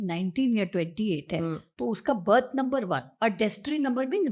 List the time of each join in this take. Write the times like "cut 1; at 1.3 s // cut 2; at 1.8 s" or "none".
cut 1; at 3.1 s